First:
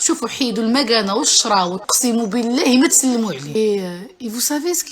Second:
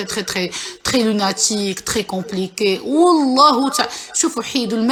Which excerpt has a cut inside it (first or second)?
first